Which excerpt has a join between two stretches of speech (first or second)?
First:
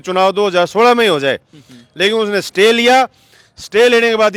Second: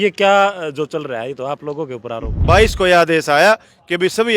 second